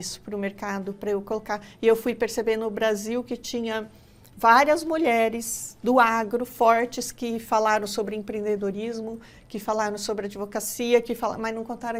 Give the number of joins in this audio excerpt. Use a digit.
0